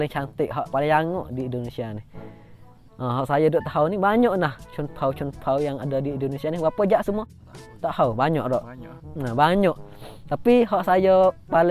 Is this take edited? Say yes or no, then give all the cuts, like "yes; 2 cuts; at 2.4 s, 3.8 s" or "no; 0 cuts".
no; 0 cuts